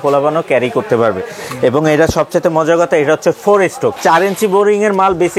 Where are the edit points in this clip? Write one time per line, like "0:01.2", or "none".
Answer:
0:04.0